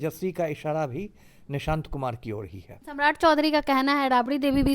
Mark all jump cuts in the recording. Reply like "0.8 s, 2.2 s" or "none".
2.8 s